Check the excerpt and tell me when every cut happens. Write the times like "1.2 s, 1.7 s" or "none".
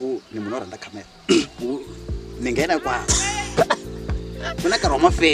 none